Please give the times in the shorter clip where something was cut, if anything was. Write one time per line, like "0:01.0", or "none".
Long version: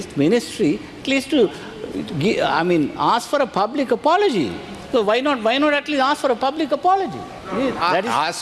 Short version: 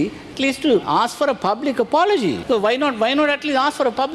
0:00.9
0:02.4